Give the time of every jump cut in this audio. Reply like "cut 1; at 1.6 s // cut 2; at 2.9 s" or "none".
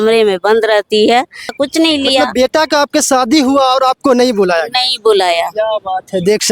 cut 1; at 1.5 s

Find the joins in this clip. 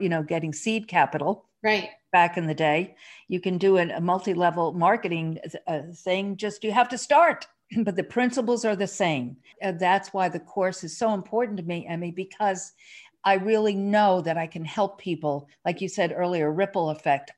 cut 1; at 7.6 s // cut 2; at 9.5 s

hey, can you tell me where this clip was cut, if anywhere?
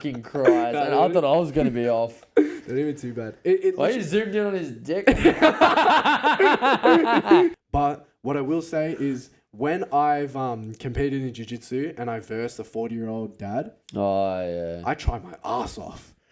cut 1; at 7.5 s

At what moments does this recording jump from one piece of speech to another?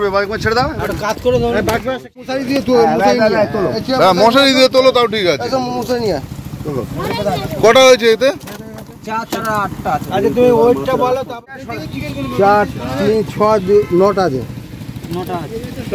cut 1; at 2.2 s // cut 2; at 11.4 s

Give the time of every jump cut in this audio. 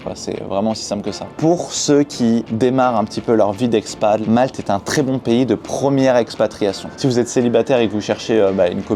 cut 1; at 1.3 s // cut 2; at 4.2 s // cut 3; at 6.9 s

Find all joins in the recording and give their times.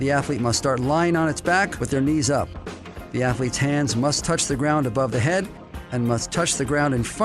none

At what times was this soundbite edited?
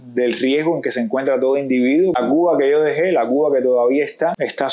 cut 1; at 2.2 s

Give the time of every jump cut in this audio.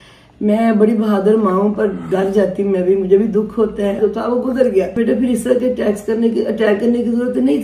cut 1; at 4.0 s // cut 2; at 5.0 s

